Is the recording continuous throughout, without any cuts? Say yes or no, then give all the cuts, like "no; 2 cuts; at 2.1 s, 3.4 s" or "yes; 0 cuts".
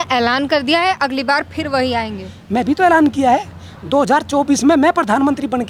yes; 0 cuts